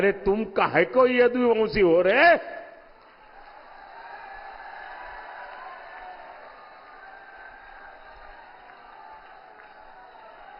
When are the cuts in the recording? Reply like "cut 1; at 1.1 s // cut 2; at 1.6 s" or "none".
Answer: none